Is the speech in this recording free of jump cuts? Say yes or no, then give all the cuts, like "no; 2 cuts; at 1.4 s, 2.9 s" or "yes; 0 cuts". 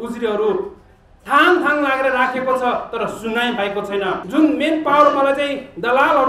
no; 1 cut; at 4.2 s